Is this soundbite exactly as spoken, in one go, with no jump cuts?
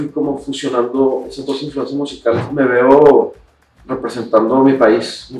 no; 1 cut; at 2.4 s

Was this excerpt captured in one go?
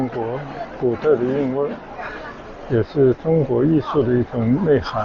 yes; 0 cuts

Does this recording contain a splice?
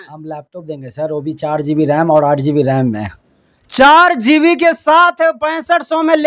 no; 0 cuts

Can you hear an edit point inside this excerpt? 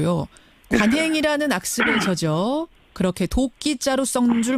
yes; 1 cut; at 2.2 s

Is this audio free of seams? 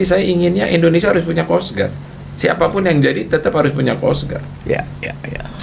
yes; 0 cuts

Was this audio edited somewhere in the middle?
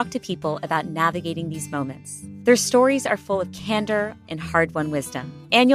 no; 0 cuts

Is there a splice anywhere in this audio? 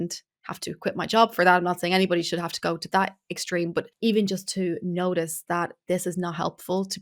yes; 1 cut; at 3.9 s

